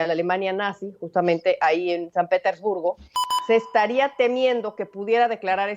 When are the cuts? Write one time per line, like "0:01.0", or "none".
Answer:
0:03.2